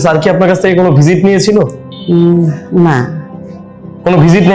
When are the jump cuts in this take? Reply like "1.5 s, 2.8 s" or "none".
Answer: none